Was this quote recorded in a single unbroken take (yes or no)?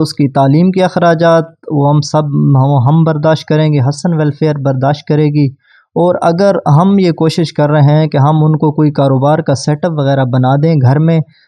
yes